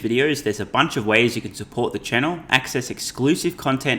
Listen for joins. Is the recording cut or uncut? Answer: uncut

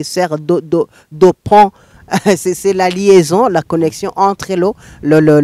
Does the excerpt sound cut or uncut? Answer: uncut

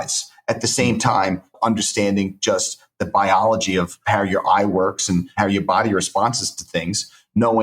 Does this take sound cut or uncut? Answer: cut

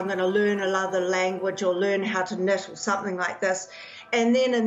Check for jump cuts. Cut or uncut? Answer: uncut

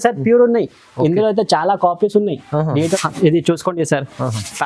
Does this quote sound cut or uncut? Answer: cut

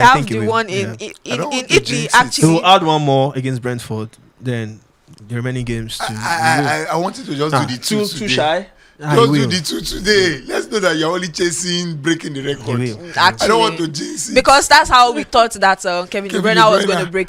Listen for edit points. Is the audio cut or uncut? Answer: uncut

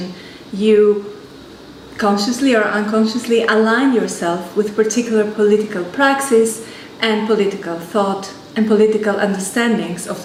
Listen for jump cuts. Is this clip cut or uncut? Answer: uncut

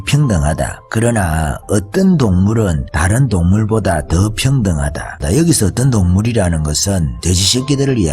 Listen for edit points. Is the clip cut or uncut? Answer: cut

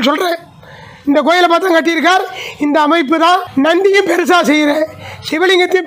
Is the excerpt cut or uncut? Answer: cut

